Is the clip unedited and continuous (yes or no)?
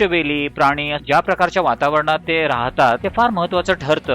no